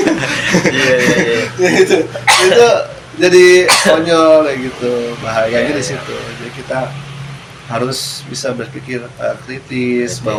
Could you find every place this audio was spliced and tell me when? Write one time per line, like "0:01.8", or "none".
none